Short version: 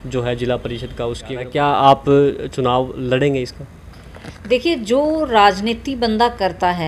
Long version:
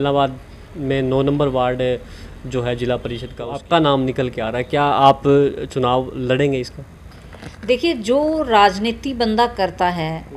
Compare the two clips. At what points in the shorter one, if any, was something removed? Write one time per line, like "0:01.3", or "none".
0:01.2

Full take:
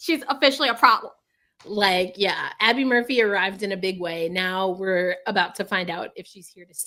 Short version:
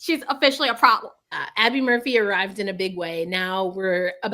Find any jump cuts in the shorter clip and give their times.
0:01.4

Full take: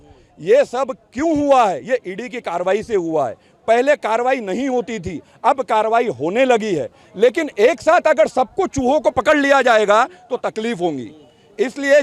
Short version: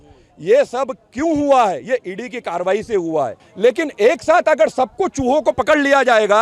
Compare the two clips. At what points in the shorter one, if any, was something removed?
0:03.4

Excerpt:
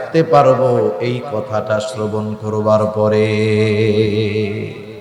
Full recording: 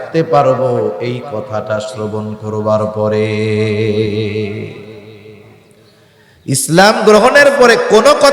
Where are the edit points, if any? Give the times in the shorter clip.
none

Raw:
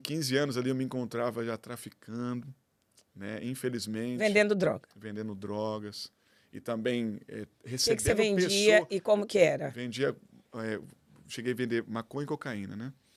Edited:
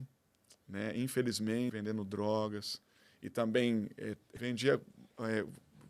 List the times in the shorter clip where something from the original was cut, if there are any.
0:01.7
0:04.4

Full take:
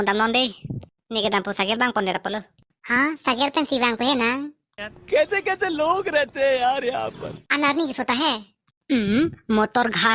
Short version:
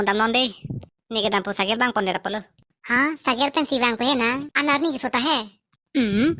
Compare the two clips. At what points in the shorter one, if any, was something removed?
0:04.5

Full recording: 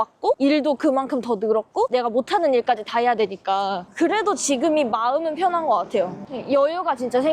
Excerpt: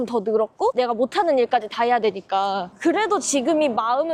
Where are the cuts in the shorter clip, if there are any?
none

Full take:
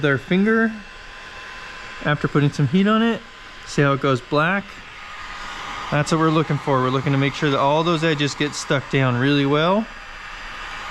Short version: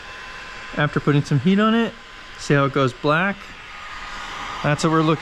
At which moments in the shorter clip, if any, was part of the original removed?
none

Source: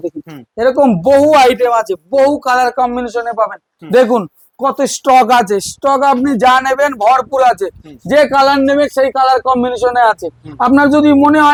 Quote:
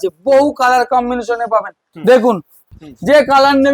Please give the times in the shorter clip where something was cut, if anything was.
0:02.6

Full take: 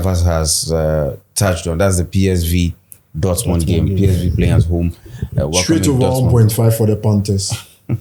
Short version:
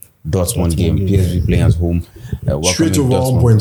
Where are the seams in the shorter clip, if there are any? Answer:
none

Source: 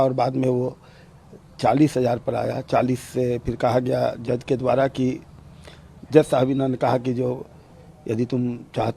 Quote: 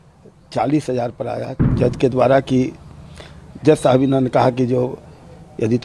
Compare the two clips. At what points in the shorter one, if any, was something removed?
0:01.6

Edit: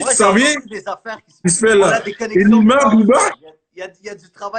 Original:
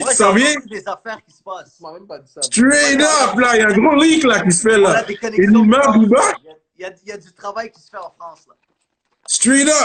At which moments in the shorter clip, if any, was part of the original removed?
0:01.4

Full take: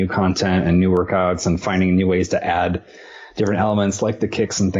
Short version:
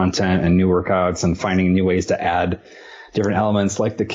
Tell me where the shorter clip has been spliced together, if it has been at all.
none

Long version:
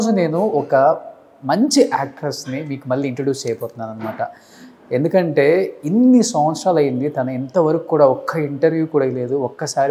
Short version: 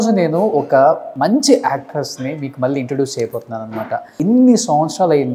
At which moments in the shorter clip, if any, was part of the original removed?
0:01.1
0:04.1

